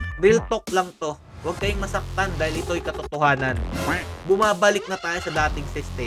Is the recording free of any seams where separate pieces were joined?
yes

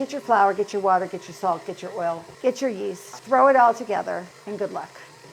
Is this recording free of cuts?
no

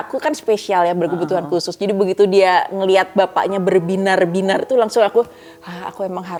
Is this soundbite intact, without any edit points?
yes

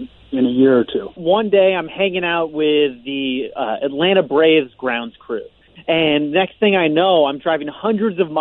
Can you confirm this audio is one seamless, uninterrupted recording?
no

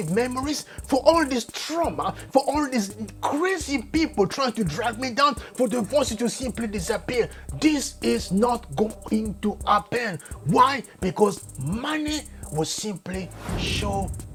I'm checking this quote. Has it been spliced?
no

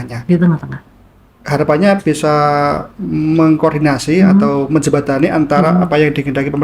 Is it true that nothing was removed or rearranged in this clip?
yes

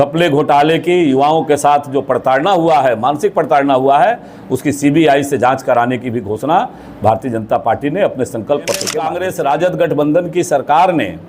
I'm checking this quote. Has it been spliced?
yes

